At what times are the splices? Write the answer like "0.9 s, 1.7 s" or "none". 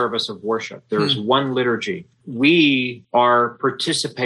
2.2 s, 3.0 s

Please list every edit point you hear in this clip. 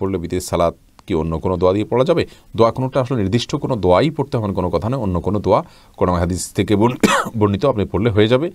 none

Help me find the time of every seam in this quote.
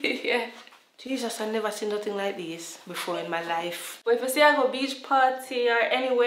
3.9 s

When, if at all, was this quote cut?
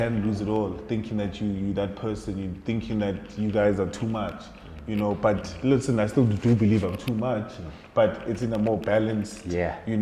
none

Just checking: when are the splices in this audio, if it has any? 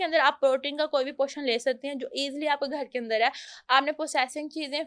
none

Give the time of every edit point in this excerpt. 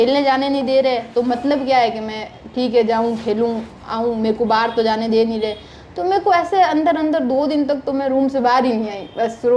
none

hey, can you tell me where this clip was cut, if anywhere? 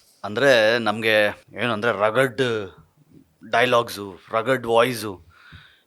1.5 s

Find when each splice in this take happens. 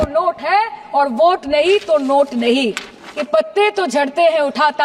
3.3 s

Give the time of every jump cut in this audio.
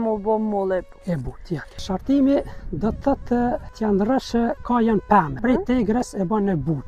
1.8 s, 3.7 s, 5.4 s

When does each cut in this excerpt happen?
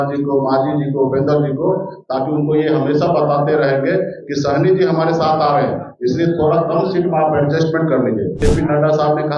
8.4 s

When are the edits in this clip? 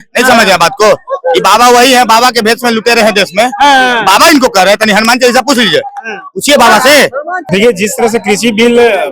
7.4 s

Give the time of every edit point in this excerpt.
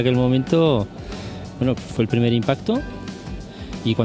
none

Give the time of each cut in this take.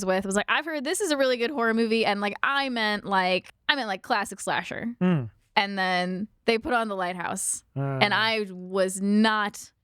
3.5 s, 6.3 s

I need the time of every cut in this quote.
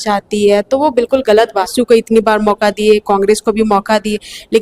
1.7 s

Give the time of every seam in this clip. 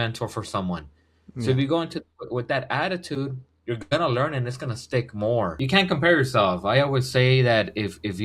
5.6 s

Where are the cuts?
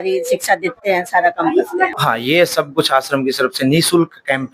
2.0 s

